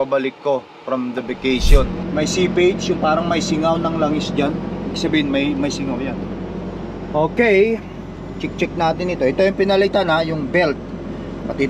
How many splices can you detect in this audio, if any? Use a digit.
1